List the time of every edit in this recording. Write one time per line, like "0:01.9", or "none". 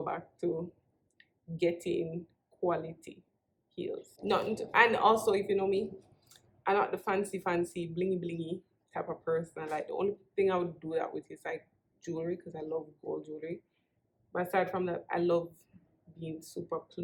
none